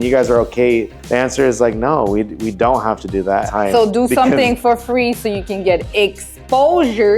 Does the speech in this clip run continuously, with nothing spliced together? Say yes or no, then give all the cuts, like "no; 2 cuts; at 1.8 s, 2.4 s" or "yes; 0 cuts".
no; 2 cuts; at 1.0 s, 3.5 s